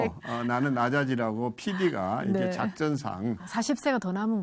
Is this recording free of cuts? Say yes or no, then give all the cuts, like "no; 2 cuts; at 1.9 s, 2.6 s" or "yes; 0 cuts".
no; 1 cut; at 3.4 s